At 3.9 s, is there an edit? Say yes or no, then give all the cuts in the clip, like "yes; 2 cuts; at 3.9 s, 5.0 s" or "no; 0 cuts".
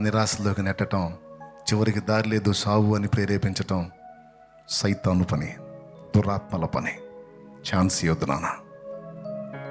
no; 0 cuts